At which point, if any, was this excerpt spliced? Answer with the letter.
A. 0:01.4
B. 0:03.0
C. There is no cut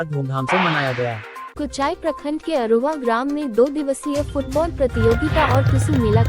A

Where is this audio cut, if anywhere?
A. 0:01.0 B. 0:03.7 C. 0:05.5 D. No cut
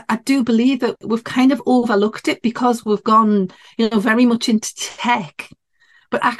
A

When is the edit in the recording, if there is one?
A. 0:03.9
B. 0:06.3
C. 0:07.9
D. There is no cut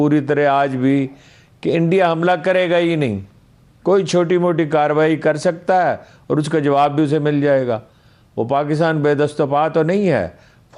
D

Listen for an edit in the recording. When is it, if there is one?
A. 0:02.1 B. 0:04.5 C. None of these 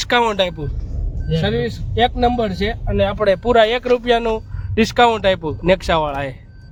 C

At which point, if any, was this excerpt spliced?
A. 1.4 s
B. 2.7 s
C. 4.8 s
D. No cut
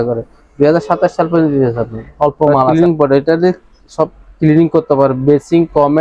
B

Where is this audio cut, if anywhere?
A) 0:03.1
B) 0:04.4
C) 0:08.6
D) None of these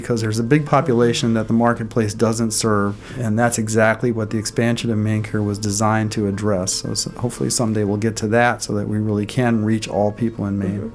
A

